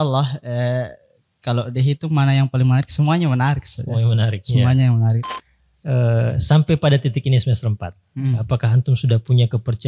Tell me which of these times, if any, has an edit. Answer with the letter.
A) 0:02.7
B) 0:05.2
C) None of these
B